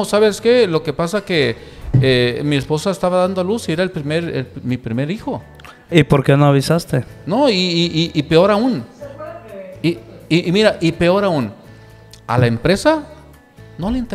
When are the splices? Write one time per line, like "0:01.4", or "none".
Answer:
none